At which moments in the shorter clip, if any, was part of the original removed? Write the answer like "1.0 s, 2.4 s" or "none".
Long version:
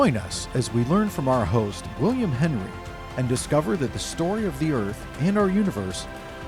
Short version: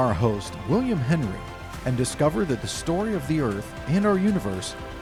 none